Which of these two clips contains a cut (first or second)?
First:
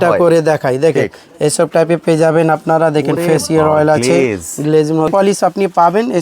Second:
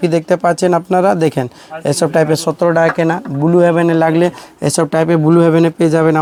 first